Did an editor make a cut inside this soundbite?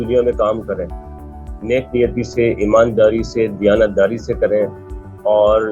no; 0 cuts

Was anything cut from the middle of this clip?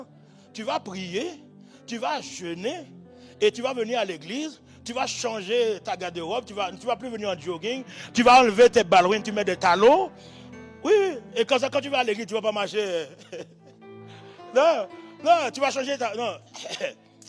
no; 0 cuts

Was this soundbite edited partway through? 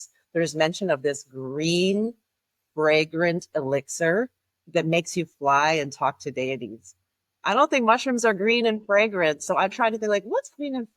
no; 0 cuts

